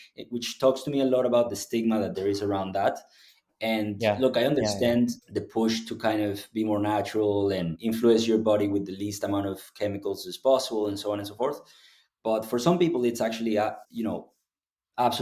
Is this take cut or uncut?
cut